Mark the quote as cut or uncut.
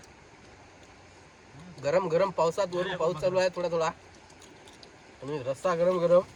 uncut